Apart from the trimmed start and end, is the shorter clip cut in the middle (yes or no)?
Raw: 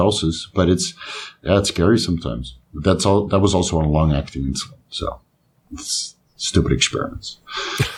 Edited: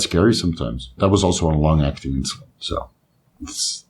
yes